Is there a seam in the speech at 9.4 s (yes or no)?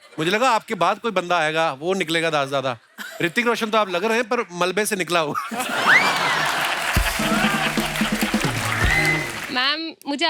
yes